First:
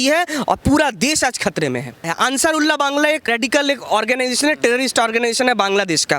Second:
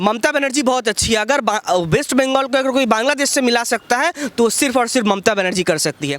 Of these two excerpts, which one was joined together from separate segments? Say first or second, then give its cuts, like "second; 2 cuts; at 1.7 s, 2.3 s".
first; 2 cuts; at 2.1 s, 3.3 s